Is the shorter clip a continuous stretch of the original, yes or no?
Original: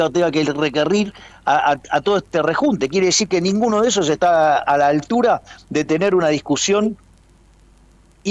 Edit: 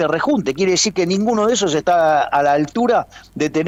yes